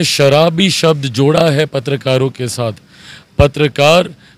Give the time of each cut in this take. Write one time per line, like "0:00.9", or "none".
none